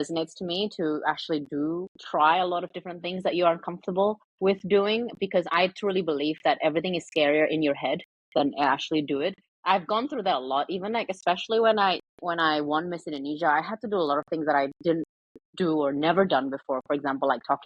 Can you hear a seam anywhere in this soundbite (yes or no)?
no